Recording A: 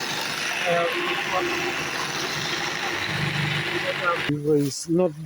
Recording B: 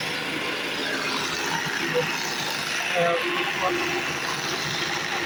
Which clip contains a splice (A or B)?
A